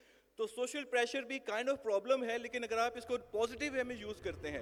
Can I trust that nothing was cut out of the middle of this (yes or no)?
yes